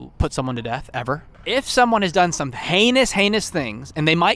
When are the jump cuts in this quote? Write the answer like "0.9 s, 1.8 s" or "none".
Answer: 1.4 s